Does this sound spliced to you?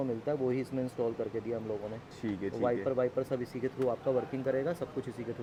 no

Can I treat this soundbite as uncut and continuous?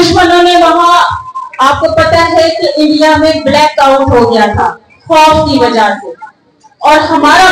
yes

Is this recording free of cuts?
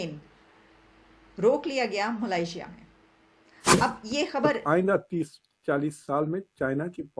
no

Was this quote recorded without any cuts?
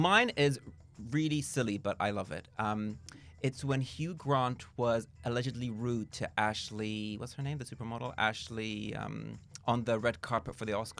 yes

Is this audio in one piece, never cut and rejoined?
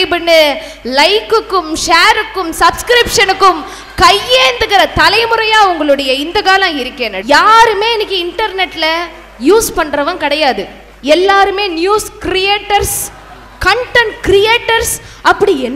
no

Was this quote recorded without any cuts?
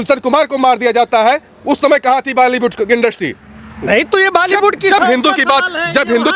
yes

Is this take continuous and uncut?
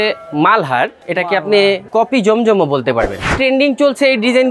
no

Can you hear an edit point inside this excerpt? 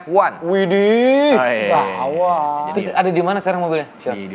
yes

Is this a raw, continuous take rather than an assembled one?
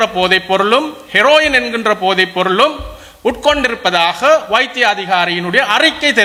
yes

